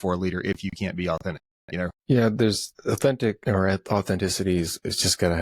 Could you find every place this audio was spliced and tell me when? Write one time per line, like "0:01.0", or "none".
0:02.0
0:02.7
0:03.4

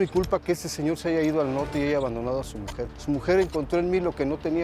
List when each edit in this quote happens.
0:02.9

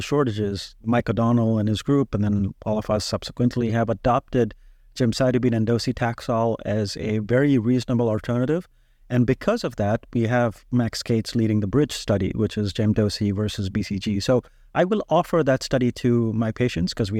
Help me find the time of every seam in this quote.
none

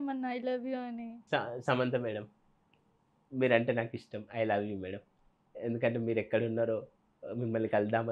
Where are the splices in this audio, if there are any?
0:01.1

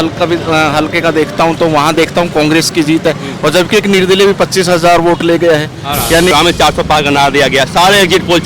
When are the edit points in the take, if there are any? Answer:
0:06.3

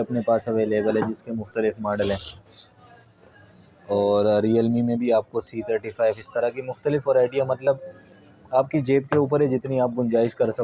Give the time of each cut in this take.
none

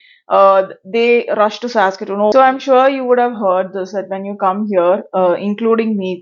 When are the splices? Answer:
0:02.3

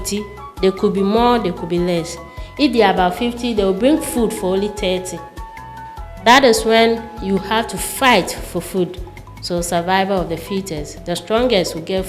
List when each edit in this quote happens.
none

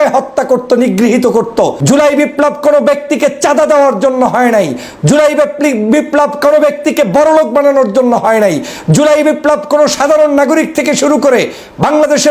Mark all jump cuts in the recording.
0:01.8

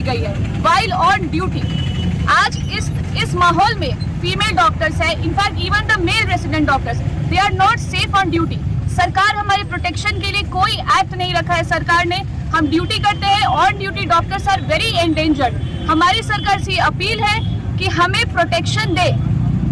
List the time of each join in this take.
none

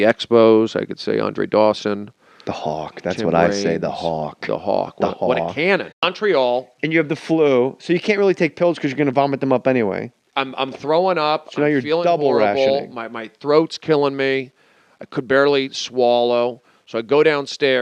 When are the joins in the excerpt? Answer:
none

